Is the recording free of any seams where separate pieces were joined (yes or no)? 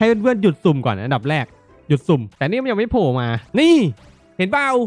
no